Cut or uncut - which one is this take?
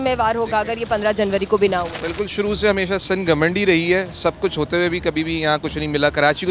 uncut